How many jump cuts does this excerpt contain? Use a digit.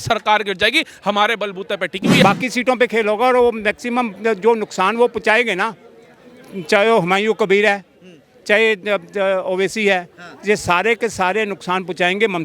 1